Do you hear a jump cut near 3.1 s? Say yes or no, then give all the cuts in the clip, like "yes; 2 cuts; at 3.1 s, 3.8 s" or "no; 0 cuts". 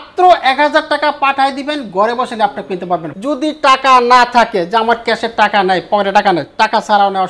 yes; 1 cut; at 3.1 s